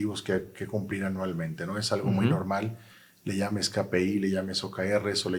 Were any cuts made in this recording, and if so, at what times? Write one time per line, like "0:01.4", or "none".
none